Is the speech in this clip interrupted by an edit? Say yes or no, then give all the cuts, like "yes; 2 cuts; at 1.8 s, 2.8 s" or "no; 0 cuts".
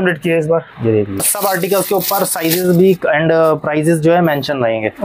yes; 1 cut; at 1.2 s